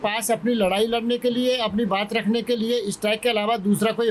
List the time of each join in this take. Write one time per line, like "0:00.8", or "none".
none